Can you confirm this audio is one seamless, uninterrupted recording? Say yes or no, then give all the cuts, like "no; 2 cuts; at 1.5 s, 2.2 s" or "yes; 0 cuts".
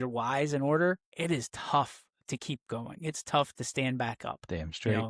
no; 1 cut; at 1.1 s